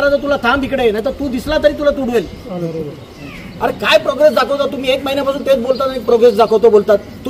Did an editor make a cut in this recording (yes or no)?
yes